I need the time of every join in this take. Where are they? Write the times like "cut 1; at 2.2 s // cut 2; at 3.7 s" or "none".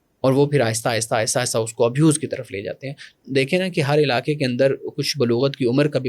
cut 1; at 3.1 s